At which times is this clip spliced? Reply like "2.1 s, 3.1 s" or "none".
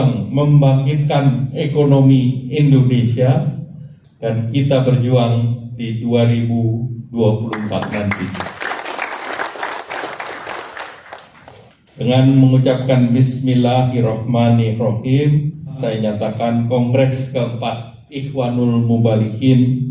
15.8 s